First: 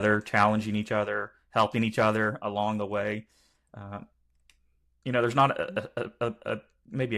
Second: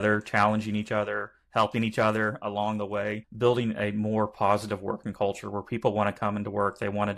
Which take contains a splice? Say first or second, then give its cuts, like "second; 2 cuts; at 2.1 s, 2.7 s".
second; 1 cut; at 3.3 s